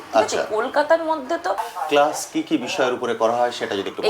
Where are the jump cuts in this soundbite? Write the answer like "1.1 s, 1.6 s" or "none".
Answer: 1.7 s